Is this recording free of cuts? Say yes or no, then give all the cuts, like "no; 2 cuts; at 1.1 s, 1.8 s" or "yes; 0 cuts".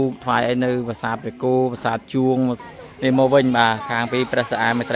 no; 1 cut; at 2.7 s